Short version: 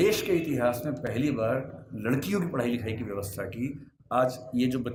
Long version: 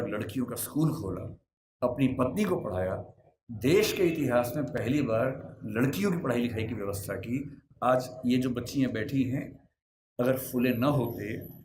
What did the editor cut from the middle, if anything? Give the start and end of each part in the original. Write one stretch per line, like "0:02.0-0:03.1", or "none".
none